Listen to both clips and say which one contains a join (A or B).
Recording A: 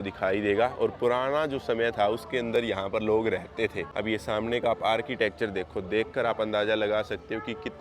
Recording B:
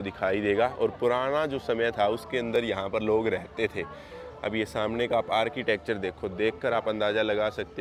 A